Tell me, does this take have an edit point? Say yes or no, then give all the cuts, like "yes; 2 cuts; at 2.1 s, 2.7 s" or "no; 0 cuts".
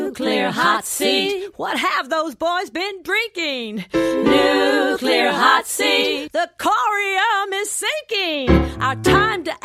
no; 0 cuts